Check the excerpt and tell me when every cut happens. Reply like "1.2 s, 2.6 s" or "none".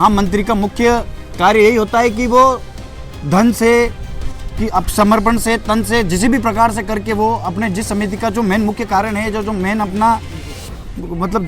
none